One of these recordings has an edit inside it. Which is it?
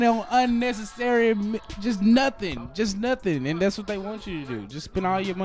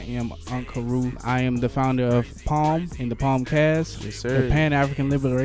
second; 1 cut; at 1.1 s

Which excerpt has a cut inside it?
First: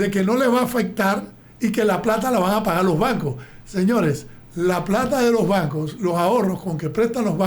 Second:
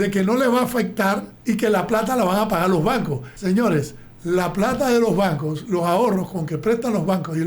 second; 2 cuts; at 1.3 s, 3.2 s

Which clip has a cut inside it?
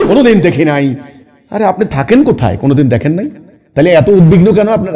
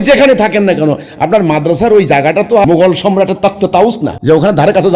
second; 2 cuts; at 2.6 s, 4.1 s

